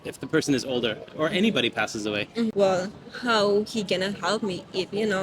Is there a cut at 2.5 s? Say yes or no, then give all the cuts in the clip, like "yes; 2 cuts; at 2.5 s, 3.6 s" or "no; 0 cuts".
yes; 1 cut; at 2.5 s